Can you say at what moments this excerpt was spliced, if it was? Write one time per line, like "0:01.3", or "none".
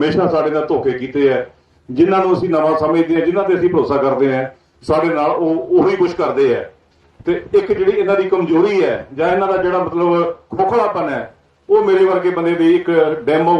none